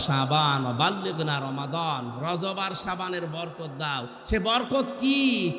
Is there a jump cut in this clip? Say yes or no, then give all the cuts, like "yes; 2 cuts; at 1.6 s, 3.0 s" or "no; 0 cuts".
no; 0 cuts